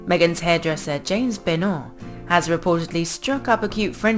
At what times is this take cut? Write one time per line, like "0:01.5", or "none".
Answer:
0:03.1